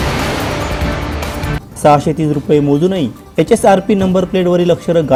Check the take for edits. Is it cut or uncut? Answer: uncut